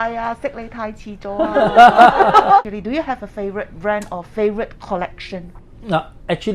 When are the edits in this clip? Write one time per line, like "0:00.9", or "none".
none